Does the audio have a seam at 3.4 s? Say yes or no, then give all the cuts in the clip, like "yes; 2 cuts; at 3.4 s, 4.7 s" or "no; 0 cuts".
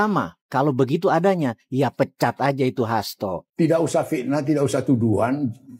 yes; 1 cut; at 3.4 s